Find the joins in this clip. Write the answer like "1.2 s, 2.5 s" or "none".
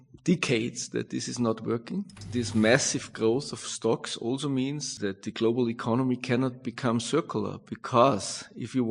2.2 s, 4.8 s